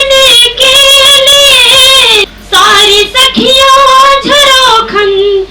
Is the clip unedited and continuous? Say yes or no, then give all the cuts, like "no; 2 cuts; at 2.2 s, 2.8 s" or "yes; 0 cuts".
no; 1 cut; at 2.3 s